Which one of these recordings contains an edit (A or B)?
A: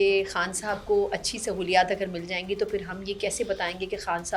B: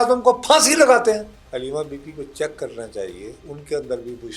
B